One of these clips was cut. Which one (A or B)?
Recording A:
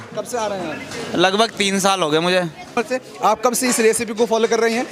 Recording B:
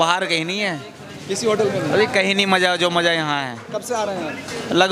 A